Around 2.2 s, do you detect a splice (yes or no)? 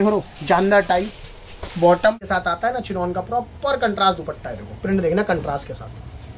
yes